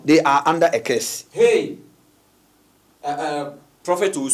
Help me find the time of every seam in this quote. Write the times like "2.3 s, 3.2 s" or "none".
none